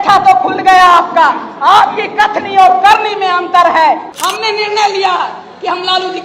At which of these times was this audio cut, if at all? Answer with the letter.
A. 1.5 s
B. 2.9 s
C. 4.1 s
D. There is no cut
C